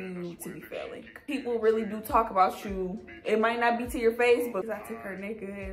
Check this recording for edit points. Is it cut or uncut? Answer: cut